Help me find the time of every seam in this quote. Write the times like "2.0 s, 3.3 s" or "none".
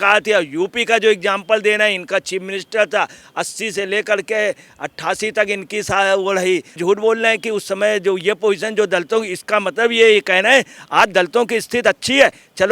6.8 s